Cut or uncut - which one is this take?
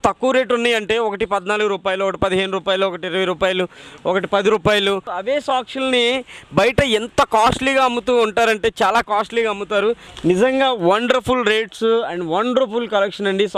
cut